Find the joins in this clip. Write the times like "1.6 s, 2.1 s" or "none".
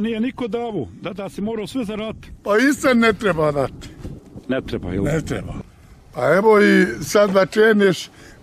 5.6 s